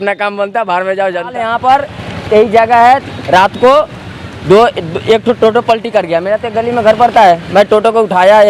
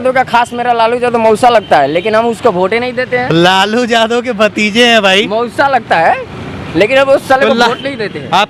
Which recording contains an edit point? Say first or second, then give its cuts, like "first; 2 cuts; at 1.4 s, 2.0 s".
first; 1 cut; at 1.4 s